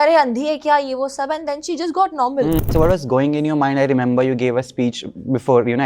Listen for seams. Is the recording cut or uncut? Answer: cut